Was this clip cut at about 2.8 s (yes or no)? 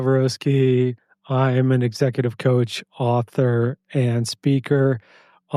no